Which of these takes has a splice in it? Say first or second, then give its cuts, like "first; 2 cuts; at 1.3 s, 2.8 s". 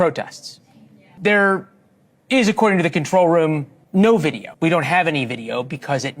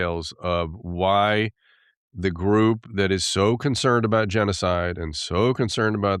first; 3 cuts; at 1.1 s, 3.7 s, 4.5 s